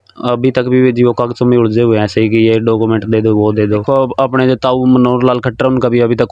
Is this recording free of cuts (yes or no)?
no